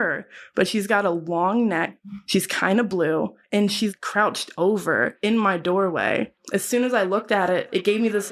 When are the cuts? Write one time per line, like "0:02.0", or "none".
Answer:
none